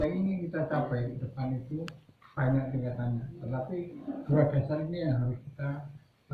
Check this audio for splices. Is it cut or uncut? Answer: uncut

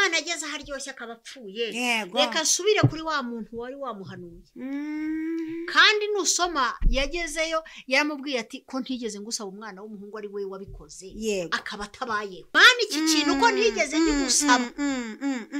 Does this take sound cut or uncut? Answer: cut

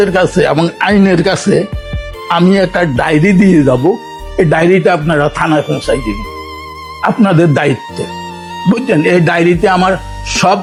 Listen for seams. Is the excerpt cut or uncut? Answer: uncut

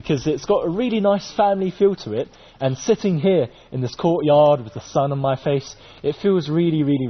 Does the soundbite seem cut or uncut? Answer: uncut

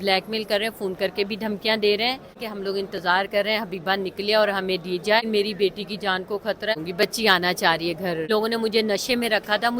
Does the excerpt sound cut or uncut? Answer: cut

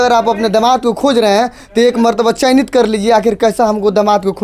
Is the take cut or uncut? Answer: uncut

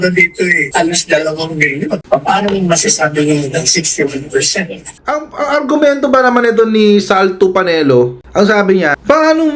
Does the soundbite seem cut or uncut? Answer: cut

